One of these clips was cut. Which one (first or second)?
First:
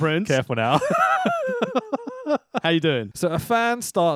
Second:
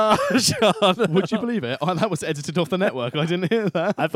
first